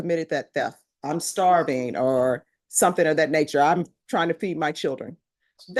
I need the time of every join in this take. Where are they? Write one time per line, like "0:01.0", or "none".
none